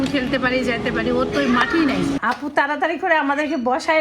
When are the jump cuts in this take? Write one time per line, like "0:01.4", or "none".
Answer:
0:02.1